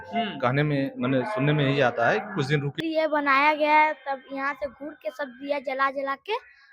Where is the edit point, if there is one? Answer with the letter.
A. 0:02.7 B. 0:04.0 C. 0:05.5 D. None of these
A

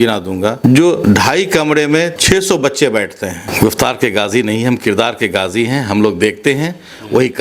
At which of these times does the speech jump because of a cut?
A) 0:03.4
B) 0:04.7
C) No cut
A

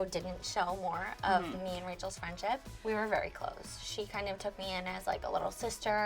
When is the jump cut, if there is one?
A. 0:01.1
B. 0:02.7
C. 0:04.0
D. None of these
B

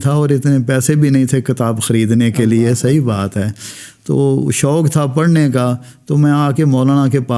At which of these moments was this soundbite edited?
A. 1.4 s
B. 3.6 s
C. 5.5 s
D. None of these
D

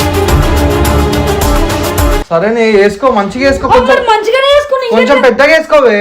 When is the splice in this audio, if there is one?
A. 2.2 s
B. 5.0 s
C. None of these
A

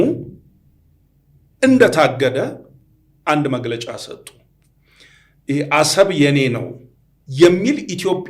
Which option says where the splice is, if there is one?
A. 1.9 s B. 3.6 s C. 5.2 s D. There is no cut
D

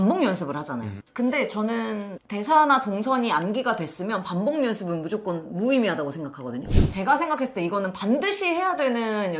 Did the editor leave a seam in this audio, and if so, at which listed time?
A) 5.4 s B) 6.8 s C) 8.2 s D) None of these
B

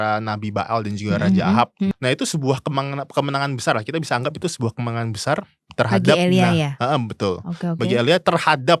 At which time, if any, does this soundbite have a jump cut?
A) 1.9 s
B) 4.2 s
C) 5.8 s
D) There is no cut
A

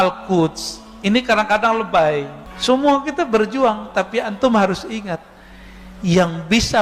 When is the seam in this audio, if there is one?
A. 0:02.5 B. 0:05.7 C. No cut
A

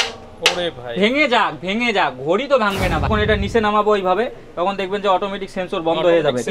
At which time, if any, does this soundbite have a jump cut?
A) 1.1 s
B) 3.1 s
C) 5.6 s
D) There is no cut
B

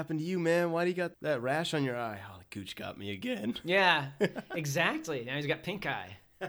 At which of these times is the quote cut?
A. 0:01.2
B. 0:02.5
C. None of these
A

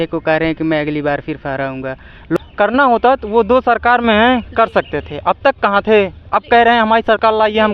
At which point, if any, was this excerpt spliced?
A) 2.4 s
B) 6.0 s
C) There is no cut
A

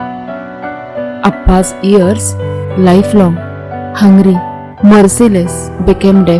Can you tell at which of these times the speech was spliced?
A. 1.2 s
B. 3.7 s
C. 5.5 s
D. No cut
A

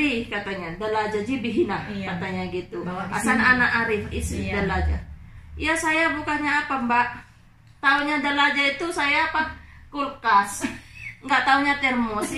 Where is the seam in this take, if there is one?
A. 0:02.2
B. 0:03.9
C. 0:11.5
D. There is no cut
D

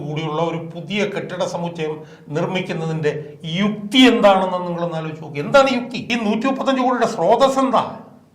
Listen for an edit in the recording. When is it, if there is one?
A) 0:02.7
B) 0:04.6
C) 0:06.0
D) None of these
C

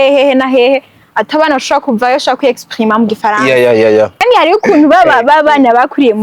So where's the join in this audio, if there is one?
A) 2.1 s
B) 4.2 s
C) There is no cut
B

